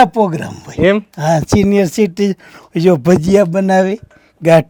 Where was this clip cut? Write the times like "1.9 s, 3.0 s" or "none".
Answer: none